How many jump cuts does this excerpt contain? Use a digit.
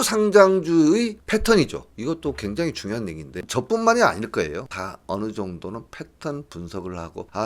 2